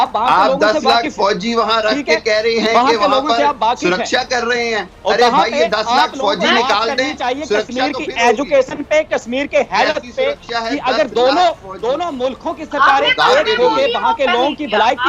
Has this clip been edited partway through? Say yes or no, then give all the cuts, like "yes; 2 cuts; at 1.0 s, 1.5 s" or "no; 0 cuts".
no; 0 cuts